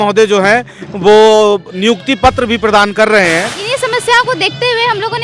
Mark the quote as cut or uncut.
cut